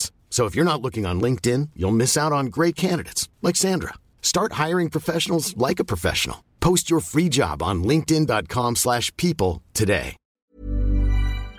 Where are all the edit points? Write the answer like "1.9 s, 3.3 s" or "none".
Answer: 10.3 s